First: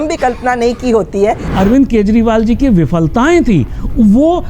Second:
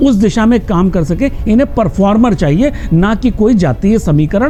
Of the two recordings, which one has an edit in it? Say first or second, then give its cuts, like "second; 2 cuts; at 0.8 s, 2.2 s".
first; 1 cut; at 1.5 s